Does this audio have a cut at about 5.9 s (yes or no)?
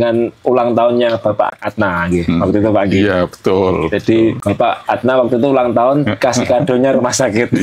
no